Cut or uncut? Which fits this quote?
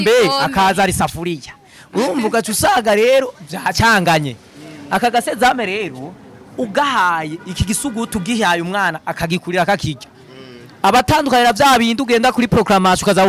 uncut